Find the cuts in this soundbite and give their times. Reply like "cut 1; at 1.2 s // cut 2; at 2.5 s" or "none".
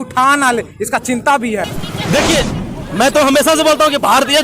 cut 1; at 1.7 s